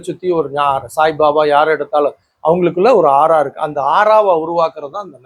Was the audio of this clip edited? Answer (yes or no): no